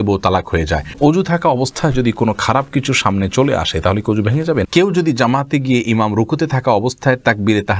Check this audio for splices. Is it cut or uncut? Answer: cut